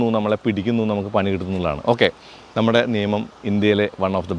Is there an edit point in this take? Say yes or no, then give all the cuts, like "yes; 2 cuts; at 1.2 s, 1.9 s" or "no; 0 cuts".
no; 0 cuts